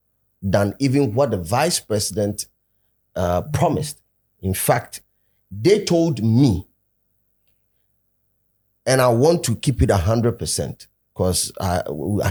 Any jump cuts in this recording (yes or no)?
no